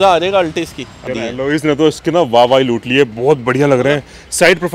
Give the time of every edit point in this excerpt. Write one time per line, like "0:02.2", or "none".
0:01.1